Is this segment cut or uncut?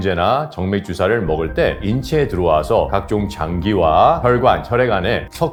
uncut